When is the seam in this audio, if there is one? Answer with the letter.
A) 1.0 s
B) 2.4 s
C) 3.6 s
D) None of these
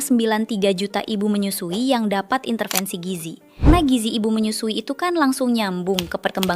C